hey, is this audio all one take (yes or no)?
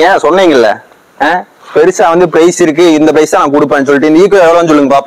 yes